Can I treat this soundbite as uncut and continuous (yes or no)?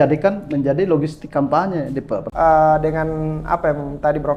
no